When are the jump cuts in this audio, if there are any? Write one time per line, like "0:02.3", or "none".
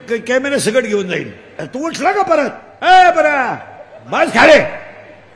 0:01.6
0:02.7